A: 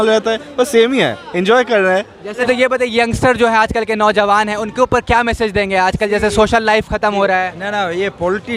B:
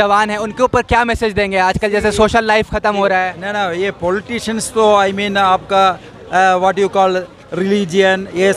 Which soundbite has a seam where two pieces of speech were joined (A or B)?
A